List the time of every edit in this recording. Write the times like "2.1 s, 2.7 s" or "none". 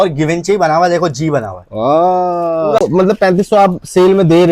2.8 s

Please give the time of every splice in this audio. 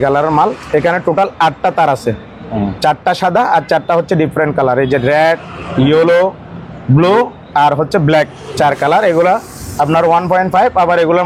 none

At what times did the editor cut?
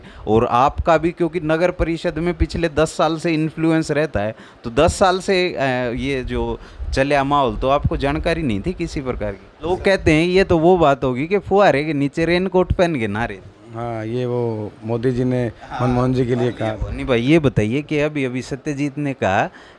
9.7 s, 16.8 s

